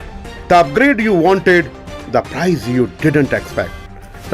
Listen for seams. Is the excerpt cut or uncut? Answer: uncut